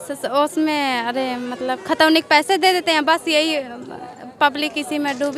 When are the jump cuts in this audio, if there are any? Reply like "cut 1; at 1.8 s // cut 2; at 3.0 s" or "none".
none